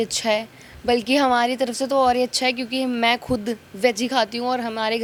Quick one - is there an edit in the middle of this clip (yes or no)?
no